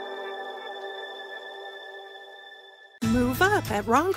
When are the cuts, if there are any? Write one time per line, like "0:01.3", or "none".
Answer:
0:02.8